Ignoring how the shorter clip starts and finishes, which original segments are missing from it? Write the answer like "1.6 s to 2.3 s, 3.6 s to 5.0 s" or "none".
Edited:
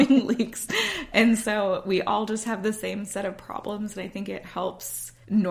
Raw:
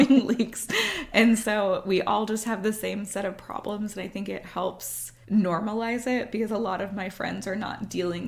none